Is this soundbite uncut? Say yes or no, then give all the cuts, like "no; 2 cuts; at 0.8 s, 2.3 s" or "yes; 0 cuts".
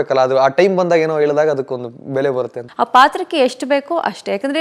no; 1 cut; at 2.6 s